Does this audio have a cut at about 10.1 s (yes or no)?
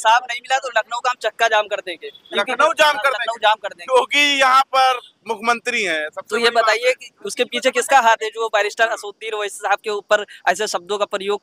no